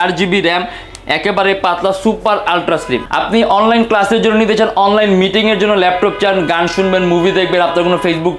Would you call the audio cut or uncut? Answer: cut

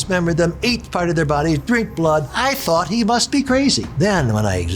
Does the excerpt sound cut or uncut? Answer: cut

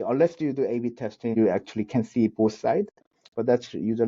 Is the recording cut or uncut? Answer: cut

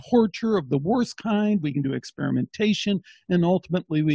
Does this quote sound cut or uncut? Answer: uncut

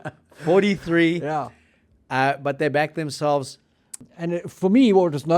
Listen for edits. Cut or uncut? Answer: cut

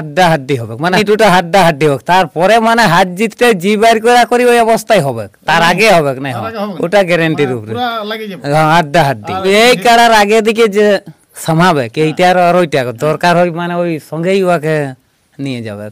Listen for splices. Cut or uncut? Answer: cut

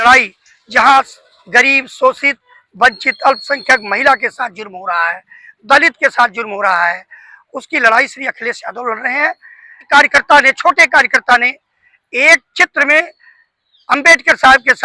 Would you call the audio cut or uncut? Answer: cut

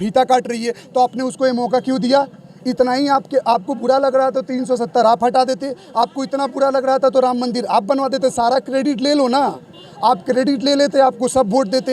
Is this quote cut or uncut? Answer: uncut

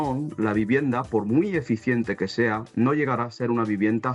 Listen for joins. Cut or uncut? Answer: uncut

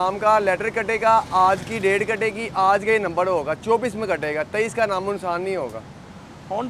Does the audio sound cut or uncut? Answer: uncut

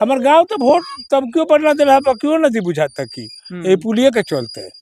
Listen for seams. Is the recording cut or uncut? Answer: uncut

